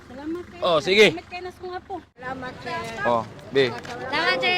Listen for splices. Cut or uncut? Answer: cut